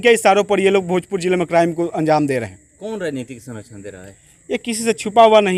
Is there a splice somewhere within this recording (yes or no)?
no